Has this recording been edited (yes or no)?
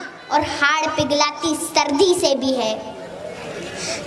no